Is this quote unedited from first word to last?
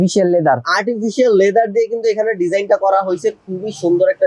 yes; 0 cuts

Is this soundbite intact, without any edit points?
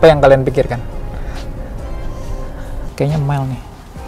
no; 1 cut; at 2.8 s

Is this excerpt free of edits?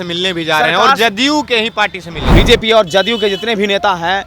no; 1 cut; at 2.2 s

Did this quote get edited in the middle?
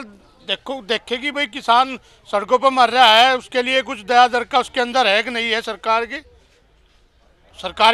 no; 0 cuts

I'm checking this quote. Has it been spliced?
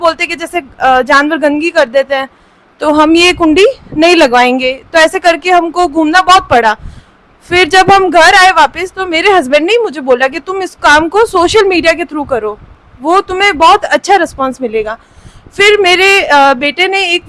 no; 0 cuts

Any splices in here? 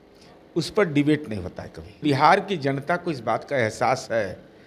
yes; 1 cut; at 2.0 s

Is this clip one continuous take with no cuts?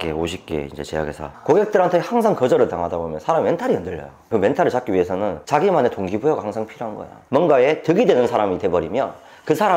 no; 2 cuts; at 1.3 s, 7.1 s

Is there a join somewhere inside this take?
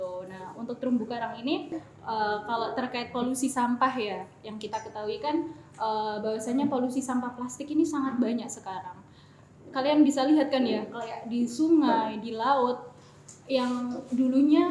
yes; 1 cut; at 1.9 s

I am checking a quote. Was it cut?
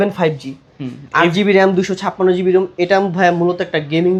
no; 0 cuts

